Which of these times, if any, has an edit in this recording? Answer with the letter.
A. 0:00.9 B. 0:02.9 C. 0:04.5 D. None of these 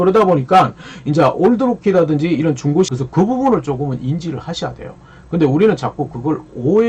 B